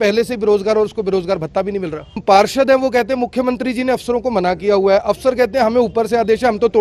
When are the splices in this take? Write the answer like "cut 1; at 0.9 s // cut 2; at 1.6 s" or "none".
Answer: cut 1; at 2.2 s